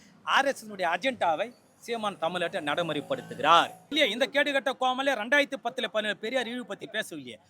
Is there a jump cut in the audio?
yes; 1 cut; at 3.8 s

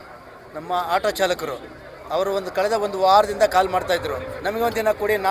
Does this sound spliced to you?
yes; 1 cut; at 4.3 s

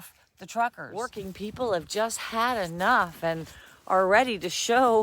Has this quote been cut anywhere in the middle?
yes; 1 cut; at 1.2 s

